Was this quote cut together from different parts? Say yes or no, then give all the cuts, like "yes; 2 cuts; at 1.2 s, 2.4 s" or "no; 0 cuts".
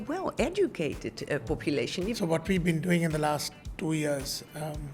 yes; 1 cut; at 2.2 s